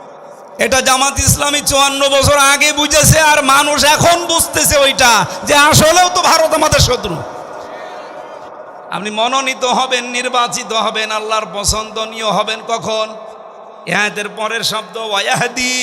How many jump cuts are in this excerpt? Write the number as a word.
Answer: one